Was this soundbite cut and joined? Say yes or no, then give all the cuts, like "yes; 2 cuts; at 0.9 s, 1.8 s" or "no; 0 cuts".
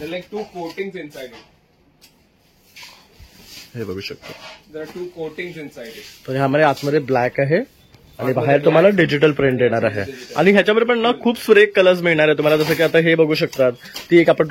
no; 0 cuts